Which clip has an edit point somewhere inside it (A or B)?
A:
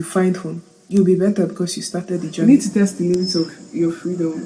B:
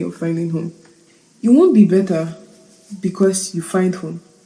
A